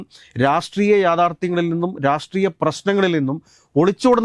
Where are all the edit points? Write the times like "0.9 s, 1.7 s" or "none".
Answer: none